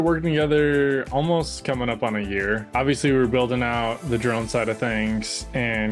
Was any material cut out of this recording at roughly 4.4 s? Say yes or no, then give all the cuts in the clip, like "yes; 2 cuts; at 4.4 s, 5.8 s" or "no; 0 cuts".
no; 1 cut; at 2.6 s